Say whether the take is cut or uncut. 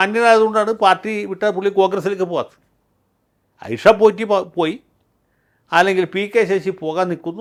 uncut